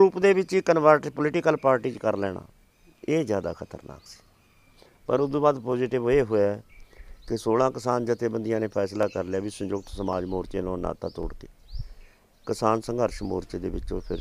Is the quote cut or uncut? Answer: uncut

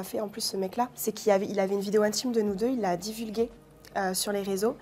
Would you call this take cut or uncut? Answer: cut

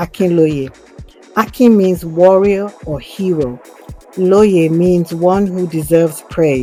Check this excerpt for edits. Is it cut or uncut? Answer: uncut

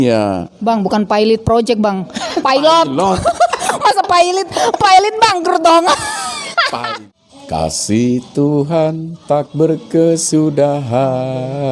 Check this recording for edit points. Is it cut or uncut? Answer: cut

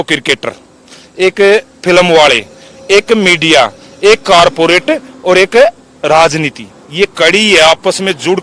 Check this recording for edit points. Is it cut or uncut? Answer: uncut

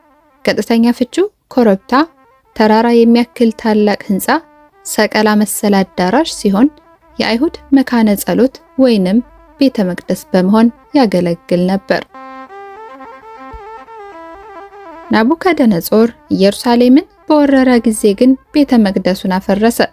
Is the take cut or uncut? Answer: cut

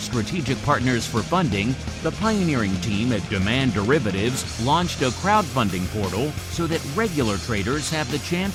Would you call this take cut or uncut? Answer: uncut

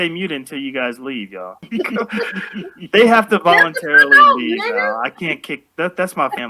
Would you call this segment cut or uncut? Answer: cut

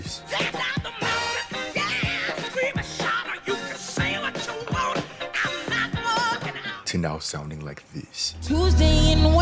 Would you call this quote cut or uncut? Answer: uncut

